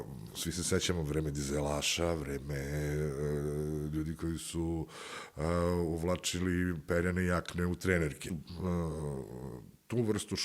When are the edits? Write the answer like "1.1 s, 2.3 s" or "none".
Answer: 8.3 s